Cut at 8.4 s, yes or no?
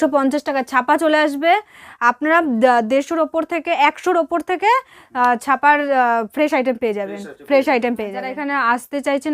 yes